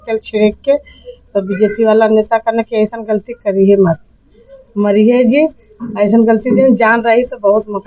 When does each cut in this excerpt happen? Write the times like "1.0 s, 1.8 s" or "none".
none